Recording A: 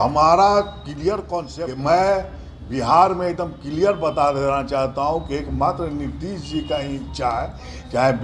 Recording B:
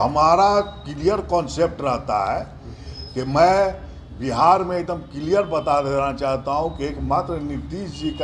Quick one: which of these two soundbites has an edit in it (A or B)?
A